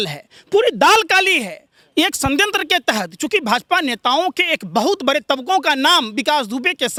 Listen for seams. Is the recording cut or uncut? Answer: uncut